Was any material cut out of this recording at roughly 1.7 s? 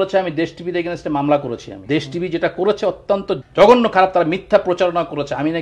yes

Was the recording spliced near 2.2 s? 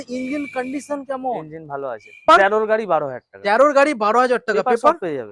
yes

